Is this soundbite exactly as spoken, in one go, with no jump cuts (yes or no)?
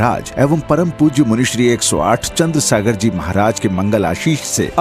yes